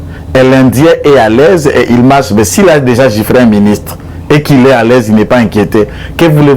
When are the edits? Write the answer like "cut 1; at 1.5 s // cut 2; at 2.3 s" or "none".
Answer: none